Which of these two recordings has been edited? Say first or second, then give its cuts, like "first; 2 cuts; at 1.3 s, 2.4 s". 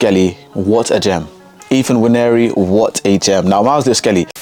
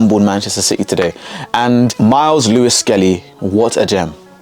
second; 1 cut; at 1.9 s